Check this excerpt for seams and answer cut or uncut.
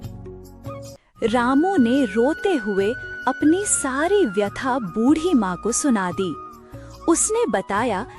cut